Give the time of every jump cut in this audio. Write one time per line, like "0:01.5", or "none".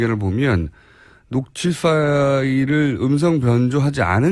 none